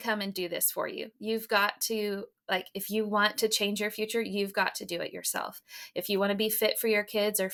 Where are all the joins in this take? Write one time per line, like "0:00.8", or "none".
none